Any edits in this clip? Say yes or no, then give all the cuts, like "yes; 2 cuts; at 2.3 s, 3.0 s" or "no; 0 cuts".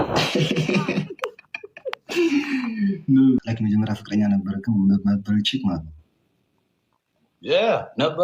yes; 1 cut; at 3.4 s